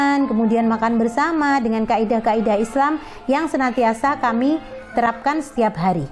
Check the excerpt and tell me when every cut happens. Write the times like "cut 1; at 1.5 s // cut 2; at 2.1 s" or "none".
cut 1; at 4.9 s